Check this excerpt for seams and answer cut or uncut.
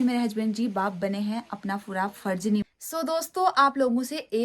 cut